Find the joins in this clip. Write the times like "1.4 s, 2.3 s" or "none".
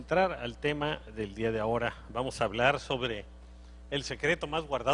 2.5 s